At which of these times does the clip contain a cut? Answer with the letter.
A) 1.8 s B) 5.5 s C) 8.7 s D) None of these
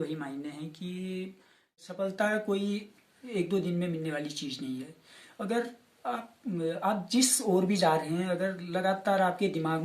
A